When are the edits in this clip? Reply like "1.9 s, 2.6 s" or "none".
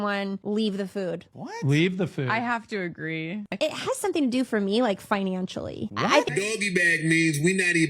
3.5 s, 6.3 s